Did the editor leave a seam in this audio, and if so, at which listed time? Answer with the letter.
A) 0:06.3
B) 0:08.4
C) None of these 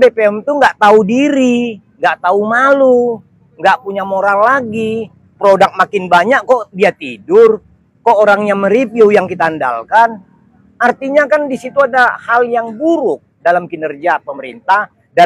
C